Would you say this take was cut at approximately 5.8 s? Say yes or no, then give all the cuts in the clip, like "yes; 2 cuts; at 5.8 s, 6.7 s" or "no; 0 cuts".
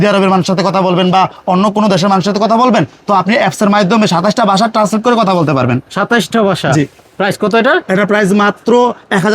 no; 0 cuts